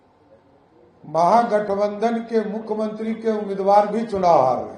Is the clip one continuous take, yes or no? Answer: yes